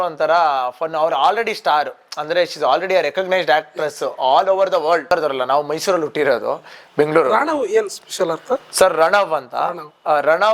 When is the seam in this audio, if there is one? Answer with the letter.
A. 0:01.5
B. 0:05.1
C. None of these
B